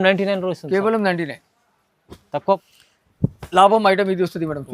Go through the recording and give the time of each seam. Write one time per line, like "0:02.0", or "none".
0:02.6